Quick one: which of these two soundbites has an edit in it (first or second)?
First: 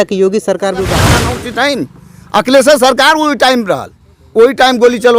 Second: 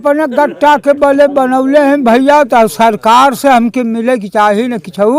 first